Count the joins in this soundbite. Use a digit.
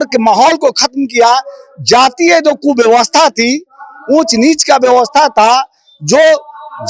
0